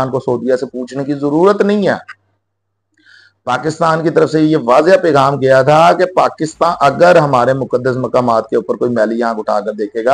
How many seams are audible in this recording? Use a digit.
0